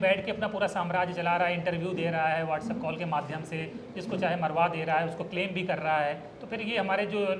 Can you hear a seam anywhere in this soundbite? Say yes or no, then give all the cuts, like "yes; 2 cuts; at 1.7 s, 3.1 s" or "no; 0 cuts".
no; 0 cuts